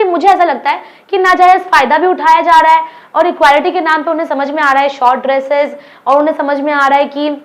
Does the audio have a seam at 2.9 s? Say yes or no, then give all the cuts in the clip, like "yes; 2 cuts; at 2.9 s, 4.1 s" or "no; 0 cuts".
no; 0 cuts